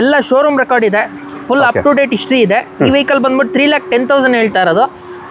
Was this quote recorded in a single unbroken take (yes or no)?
yes